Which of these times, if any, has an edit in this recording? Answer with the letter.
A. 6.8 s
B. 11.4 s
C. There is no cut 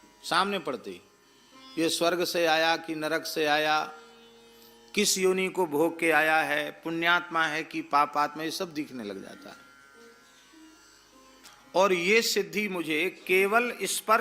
B